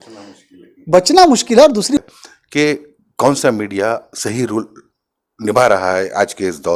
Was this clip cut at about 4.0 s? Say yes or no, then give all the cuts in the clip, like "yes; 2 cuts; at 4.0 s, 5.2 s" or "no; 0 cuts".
no; 1 cut; at 2.0 s